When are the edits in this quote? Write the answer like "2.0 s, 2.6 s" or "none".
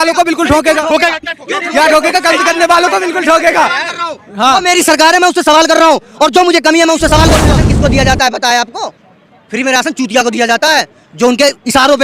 7.6 s